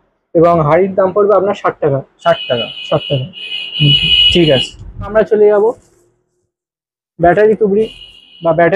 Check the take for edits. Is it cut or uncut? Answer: uncut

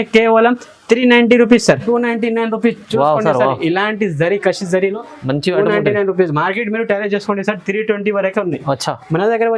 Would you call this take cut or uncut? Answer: cut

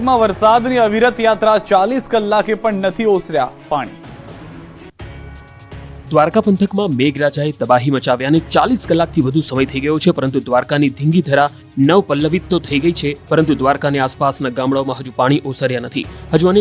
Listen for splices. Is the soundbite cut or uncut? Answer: cut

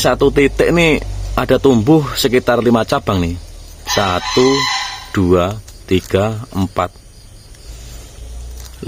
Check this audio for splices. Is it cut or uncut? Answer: uncut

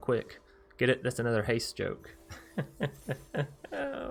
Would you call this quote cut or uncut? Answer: uncut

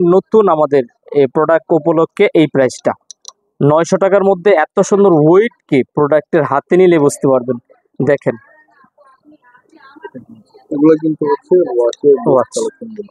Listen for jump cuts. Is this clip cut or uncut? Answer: uncut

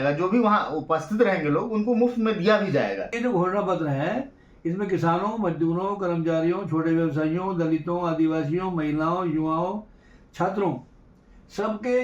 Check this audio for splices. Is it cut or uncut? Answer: cut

